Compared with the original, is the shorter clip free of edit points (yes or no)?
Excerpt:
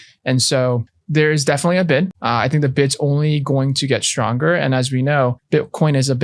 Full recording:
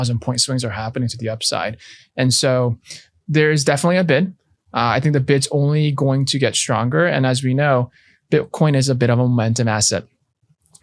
no